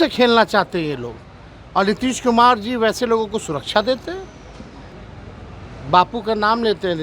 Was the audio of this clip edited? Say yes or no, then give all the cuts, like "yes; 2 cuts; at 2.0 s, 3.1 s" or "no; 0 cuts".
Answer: yes; 1 cut; at 4.9 s